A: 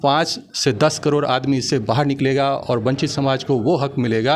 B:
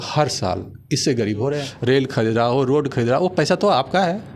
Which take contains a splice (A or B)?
B